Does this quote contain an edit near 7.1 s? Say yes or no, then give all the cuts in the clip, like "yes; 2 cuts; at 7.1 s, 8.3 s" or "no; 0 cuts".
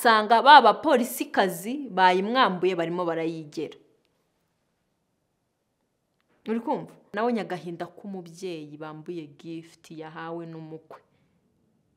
yes; 1 cut; at 7.1 s